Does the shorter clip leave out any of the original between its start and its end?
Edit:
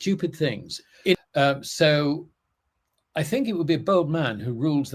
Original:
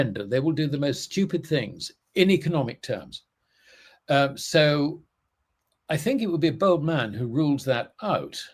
yes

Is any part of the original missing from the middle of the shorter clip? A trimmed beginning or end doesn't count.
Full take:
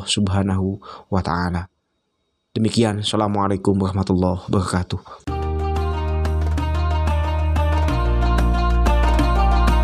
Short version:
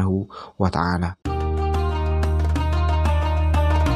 yes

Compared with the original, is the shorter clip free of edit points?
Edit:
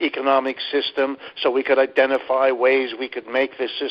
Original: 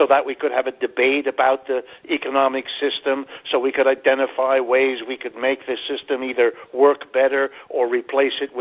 yes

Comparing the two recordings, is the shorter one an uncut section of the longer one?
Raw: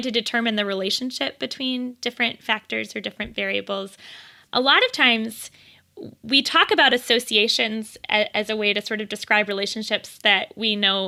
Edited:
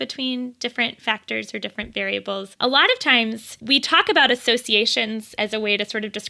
no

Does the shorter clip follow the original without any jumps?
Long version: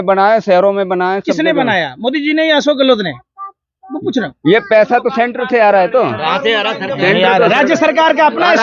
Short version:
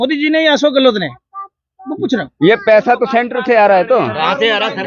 yes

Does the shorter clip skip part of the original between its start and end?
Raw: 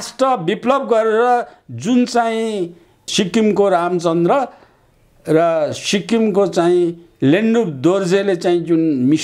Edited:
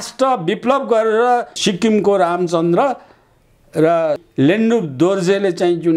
yes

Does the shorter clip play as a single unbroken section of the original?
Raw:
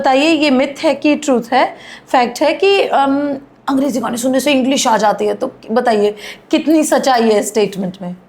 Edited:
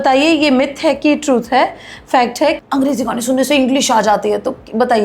no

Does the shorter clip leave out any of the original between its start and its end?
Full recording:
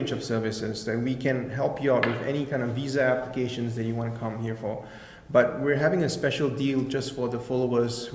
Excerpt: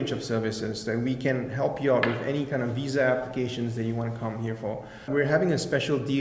yes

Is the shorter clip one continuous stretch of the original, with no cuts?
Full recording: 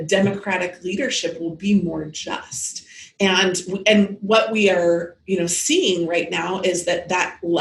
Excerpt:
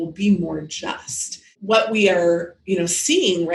no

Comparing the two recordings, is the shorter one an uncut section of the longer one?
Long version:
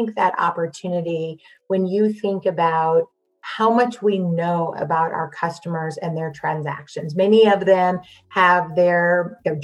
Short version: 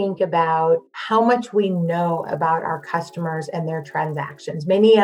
no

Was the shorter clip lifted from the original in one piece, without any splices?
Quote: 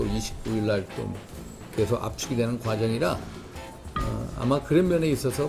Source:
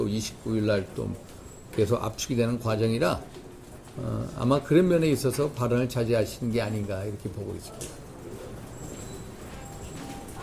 yes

